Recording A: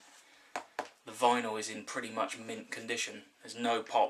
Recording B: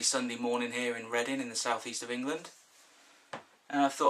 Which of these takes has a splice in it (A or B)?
A